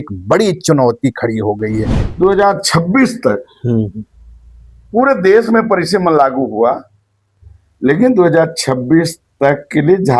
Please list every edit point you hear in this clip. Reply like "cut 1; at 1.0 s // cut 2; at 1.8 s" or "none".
cut 1; at 2.0 s